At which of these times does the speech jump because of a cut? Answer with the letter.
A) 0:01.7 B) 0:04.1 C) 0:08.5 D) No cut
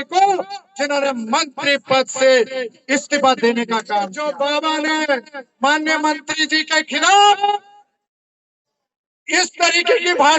B